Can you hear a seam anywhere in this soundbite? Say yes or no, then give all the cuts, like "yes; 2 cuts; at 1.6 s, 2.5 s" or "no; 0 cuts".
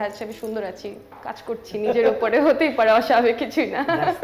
no; 0 cuts